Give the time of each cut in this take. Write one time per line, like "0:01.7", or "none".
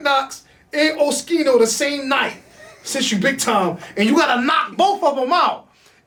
none